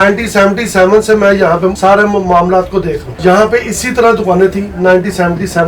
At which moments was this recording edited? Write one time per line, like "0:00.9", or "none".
0:01.8
0:03.1